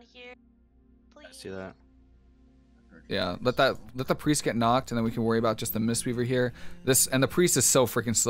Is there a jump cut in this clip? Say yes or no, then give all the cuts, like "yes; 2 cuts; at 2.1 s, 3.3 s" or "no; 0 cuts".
no; 0 cuts